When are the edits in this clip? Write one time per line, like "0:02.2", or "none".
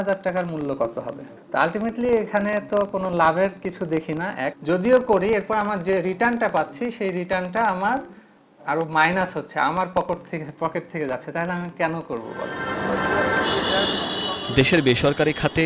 none